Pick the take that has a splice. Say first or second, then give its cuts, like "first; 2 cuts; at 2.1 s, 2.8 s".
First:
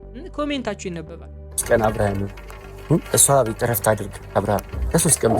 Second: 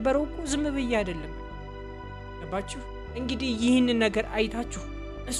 first; 1 cut; at 1.5 s